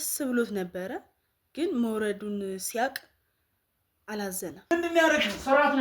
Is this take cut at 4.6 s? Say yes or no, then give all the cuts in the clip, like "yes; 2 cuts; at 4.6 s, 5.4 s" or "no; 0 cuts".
yes; 1 cut; at 4.6 s